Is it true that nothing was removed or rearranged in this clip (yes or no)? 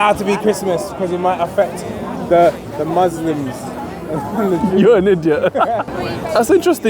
no